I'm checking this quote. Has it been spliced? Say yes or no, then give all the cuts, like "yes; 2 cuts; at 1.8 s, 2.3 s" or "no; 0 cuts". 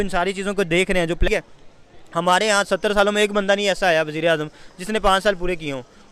yes; 1 cut; at 1.2 s